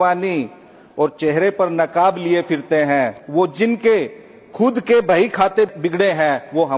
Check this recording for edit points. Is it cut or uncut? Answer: cut